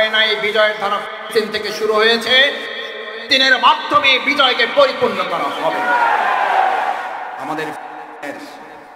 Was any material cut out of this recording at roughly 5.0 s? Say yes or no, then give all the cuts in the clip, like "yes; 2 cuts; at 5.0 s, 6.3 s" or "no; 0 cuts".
no; 0 cuts